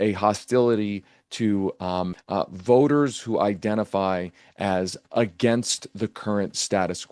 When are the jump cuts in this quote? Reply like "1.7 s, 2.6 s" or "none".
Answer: 2.2 s

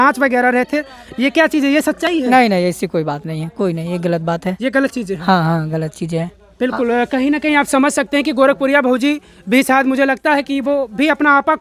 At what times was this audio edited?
none

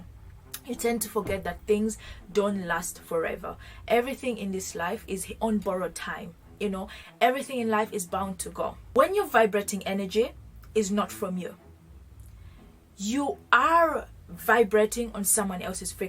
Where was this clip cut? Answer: 8.8 s

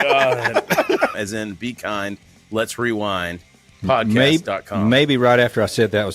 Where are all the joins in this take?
1.1 s

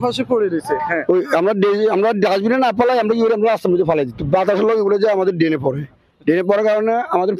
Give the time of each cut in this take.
none

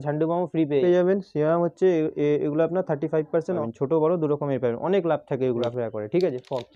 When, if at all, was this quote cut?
0.8 s, 3.7 s, 5.7 s

